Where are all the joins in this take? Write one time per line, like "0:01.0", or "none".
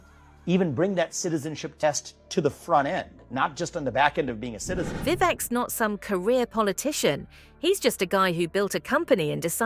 none